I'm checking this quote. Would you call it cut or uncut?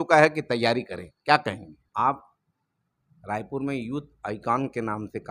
cut